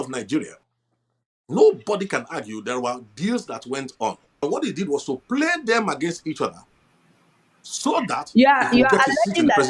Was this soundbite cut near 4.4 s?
yes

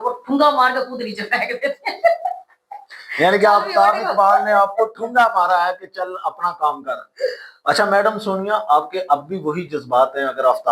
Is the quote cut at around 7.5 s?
yes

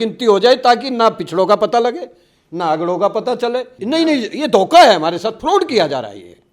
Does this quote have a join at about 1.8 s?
no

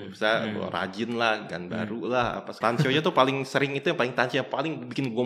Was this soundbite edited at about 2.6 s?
yes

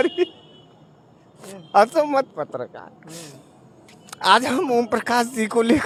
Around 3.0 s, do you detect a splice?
no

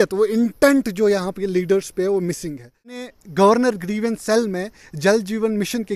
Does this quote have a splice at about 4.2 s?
no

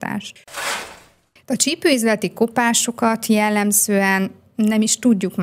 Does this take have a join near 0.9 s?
yes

